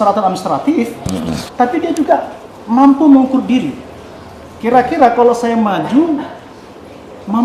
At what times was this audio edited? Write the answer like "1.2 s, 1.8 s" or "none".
none